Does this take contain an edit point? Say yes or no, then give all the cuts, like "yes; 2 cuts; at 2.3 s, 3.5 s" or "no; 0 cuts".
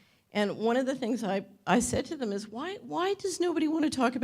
yes; 1 cut; at 2.6 s